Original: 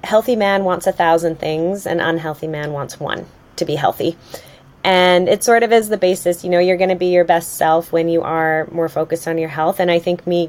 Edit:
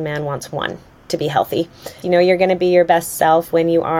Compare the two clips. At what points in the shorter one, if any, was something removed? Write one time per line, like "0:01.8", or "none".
0:02.0